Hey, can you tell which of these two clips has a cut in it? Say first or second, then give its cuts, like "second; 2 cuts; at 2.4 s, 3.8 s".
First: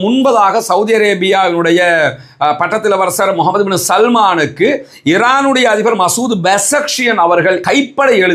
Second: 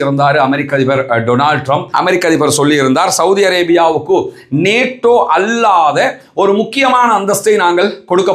second; 1 cut; at 1.9 s